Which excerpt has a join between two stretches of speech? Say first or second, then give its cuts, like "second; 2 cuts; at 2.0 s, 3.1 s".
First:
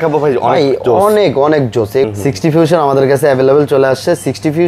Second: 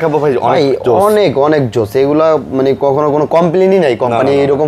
first; 1 cut; at 2.1 s